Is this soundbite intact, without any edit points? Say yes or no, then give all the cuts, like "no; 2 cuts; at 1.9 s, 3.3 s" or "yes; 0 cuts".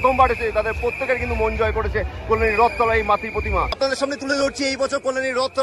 no; 1 cut; at 3.7 s